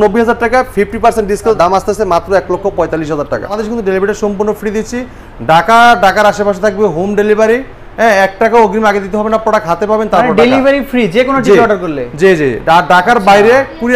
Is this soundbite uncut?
no; 2 cuts; at 1.6 s, 3.6 s

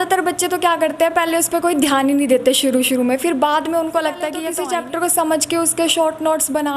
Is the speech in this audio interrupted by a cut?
yes; 1 cut; at 4.4 s

